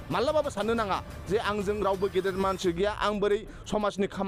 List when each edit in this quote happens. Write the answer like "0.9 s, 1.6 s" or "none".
none